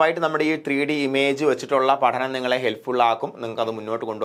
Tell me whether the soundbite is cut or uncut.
uncut